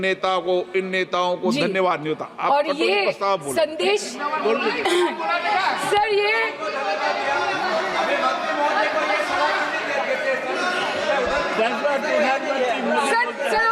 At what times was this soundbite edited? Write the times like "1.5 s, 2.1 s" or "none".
none